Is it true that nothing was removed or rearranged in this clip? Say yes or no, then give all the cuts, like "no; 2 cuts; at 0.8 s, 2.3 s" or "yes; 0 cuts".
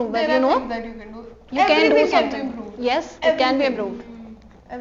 yes; 0 cuts